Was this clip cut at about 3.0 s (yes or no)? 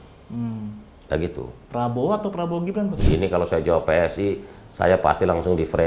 yes